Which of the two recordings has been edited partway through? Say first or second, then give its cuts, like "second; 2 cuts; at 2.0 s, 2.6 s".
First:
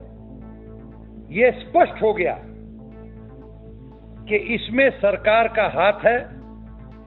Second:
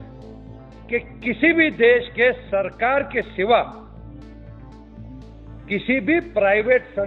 first; 3 cuts; at 2.4 s, 3.8 s, 6.3 s